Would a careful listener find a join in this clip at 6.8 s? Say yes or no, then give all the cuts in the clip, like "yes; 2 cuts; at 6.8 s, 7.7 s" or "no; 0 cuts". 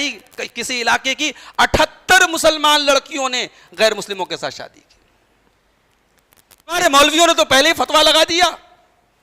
yes; 1 cut; at 6.8 s